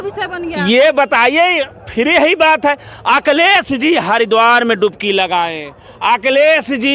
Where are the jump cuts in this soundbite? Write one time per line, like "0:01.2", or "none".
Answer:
none